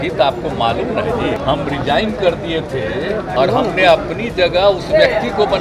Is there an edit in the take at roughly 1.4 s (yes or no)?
yes